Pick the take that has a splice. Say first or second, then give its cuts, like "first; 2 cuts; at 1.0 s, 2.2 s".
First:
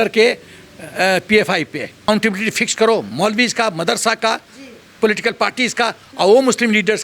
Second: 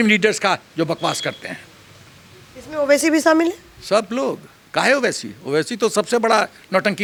first; 1 cut; at 2.1 s